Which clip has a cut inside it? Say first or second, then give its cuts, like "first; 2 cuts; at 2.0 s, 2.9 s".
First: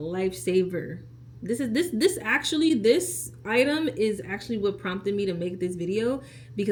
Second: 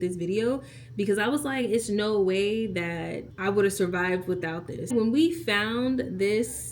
second; 1 cut; at 4.9 s